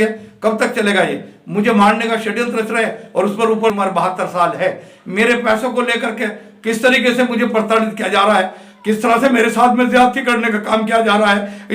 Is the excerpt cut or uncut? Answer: cut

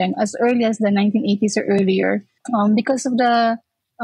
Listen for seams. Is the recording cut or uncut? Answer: cut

